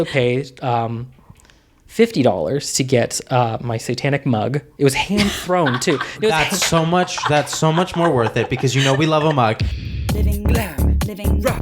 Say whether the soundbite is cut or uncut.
cut